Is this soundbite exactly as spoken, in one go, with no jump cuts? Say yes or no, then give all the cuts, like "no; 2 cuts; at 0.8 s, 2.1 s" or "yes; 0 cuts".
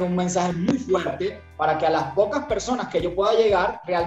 yes; 0 cuts